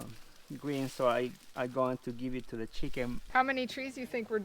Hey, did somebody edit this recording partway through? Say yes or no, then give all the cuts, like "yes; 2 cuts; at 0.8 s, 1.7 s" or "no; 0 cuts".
yes; 1 cut; at 3.2 s